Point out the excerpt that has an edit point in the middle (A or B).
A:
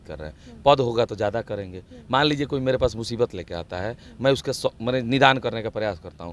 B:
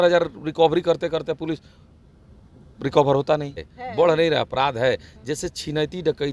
B